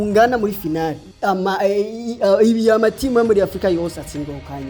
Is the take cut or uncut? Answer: cut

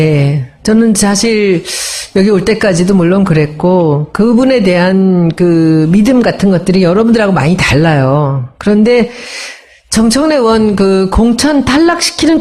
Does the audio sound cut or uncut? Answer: uncut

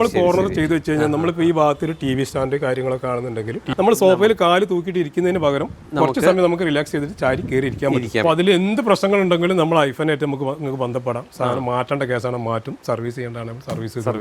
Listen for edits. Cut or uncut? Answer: cut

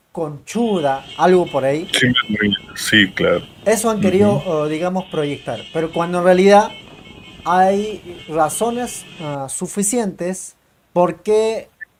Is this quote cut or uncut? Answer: uncut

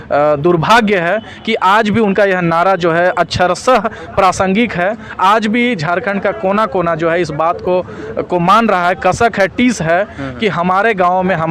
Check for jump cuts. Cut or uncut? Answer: uncut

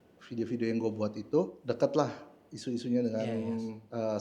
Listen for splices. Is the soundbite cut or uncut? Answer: uncut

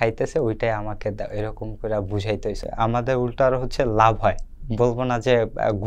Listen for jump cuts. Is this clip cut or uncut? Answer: cut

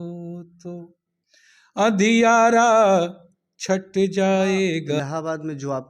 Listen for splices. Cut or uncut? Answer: cut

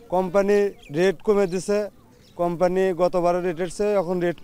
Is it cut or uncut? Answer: uncut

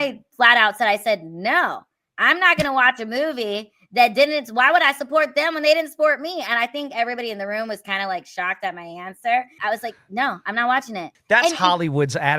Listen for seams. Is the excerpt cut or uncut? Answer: cut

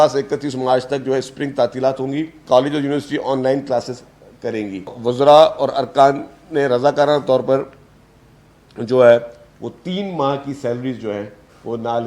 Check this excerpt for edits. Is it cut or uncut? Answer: cut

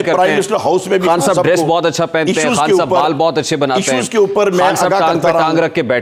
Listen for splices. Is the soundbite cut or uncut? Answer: uncut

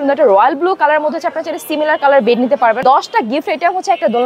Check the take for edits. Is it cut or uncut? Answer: cut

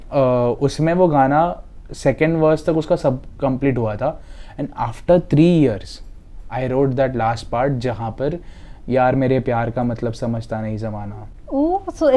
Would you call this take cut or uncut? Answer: uncut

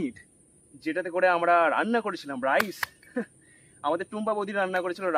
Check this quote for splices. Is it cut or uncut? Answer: uncut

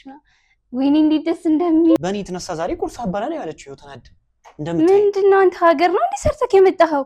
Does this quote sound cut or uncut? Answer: cut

